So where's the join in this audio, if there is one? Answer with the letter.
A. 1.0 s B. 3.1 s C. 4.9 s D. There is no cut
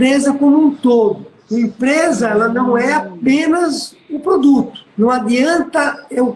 D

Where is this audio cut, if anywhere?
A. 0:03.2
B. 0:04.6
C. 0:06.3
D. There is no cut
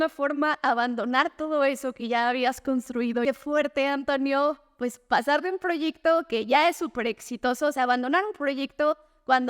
A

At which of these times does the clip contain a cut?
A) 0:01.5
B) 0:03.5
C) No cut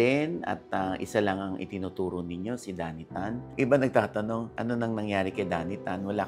B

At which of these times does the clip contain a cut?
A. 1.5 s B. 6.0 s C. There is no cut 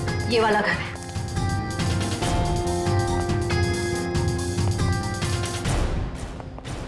C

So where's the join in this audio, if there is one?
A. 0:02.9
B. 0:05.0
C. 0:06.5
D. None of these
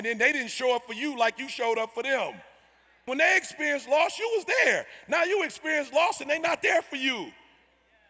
A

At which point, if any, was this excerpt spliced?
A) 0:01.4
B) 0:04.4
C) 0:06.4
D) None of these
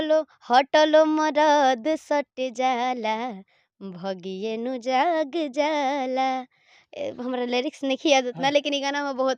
D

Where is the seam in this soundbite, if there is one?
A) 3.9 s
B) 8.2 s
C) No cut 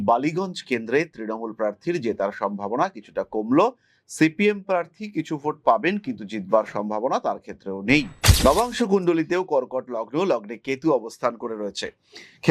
B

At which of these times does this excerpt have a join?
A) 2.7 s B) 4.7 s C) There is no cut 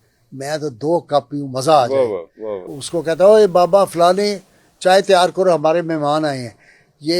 A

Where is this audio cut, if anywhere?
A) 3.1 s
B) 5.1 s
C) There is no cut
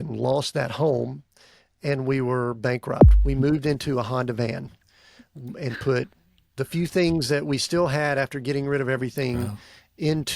A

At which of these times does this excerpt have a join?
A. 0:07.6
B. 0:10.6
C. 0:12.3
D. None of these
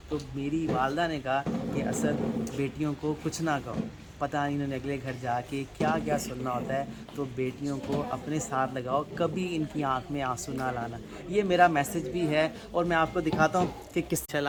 D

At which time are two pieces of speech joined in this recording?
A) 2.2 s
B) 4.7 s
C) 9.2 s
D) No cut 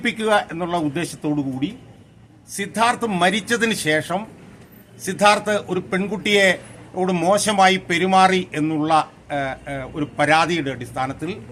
D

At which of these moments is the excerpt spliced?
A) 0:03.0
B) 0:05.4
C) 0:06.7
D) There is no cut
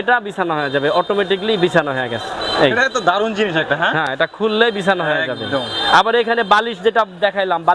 D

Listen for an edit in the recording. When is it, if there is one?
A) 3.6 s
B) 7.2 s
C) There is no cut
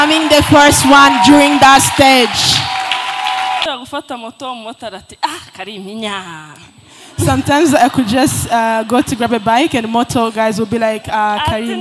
A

